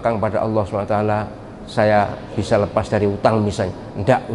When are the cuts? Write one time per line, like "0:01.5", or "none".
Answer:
none